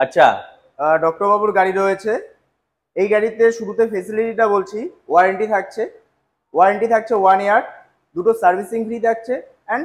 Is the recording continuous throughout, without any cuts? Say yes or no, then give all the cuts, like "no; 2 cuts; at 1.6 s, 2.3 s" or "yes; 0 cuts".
yes; 0 cuts